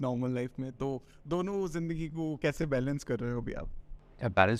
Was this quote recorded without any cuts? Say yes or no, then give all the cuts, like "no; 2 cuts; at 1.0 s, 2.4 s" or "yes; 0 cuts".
yes; 0 cuts